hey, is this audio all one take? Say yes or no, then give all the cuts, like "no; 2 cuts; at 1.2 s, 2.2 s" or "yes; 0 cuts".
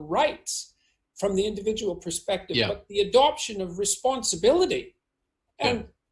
no; 1 cut; at 1.3 s